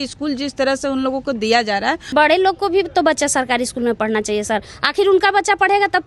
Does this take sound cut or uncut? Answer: cut